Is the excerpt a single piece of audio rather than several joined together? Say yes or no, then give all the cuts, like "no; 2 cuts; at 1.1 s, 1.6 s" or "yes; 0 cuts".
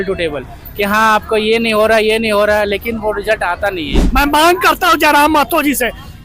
no; 1 cut; at 3.9 s